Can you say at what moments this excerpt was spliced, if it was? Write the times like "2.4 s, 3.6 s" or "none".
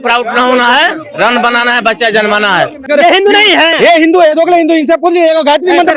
2.8 s